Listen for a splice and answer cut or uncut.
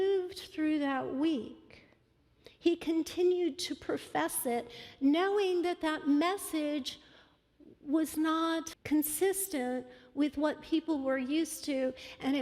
cut